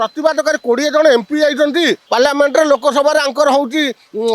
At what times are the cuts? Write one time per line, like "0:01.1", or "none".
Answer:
0:02.0

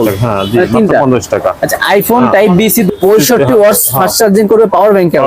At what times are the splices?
0:02.9

